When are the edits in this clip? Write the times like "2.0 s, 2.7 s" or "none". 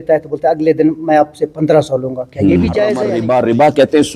3.1 s